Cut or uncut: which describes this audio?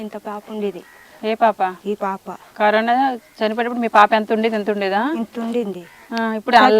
uncut